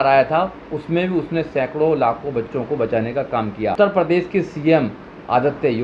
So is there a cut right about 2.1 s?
no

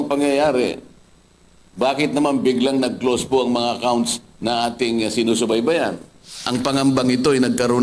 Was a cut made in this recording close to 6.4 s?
yes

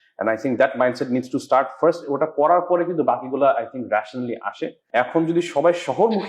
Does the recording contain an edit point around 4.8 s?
yes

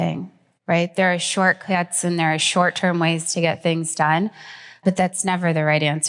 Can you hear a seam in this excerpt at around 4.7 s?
yes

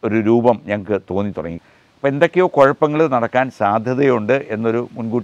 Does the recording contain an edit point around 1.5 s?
yes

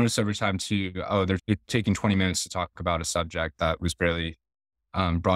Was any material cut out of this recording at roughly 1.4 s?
yes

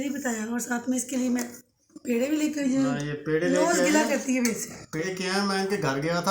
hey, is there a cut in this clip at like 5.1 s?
yes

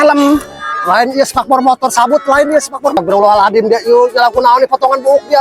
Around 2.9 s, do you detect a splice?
yes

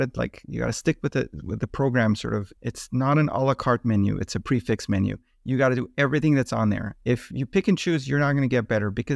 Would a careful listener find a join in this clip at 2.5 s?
yes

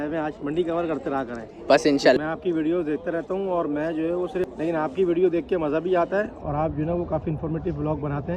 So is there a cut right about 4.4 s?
yes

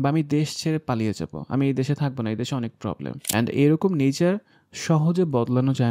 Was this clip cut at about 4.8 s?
no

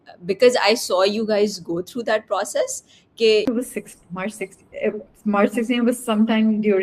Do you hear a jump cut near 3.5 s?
yes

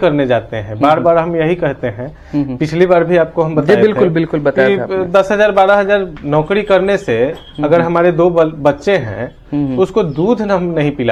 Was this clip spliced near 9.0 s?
no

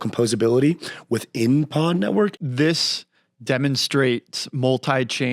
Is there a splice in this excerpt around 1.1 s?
no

